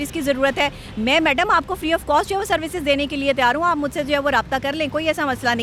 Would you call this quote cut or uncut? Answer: uncut